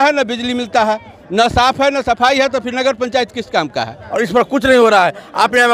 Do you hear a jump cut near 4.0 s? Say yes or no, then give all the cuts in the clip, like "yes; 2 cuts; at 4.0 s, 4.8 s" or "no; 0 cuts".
yes; 1 cut; at 4.0 s